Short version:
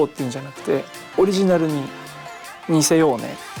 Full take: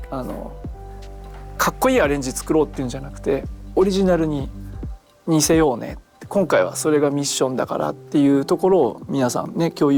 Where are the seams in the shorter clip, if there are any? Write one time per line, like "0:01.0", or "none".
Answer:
none